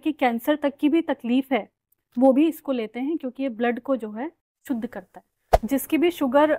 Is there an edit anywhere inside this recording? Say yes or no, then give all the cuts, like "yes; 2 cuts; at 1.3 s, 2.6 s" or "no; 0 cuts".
yes; 1 cut; at 5.6 s